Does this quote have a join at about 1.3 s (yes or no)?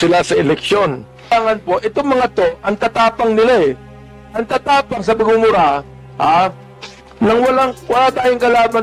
yes